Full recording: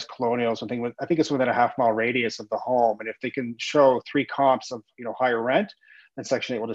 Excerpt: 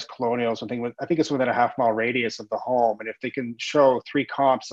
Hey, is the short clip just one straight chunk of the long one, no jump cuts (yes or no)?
yes